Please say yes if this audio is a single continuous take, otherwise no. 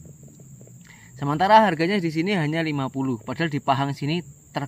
yes